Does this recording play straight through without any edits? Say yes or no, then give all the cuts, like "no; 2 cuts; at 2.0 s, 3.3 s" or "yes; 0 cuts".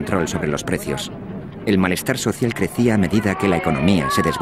no; 1 cut; at 2.0 s